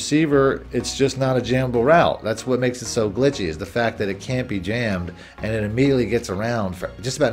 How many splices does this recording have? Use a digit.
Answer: 0